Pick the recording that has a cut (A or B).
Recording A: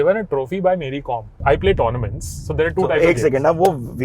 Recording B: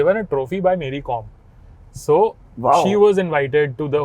A